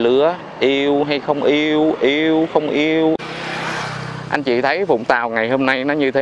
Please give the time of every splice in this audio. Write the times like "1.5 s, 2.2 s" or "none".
3.2 s